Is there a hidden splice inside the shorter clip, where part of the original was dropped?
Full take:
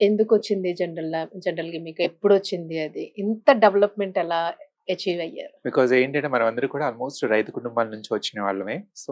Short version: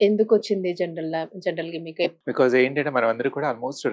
yes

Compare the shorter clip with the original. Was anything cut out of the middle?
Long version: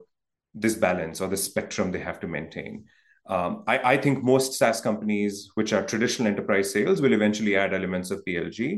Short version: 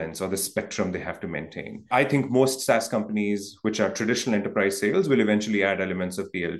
yes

